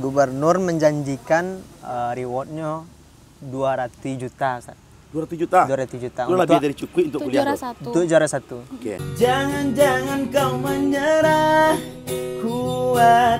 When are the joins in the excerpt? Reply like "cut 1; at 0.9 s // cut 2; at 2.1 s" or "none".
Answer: cut 1; at 9.0 s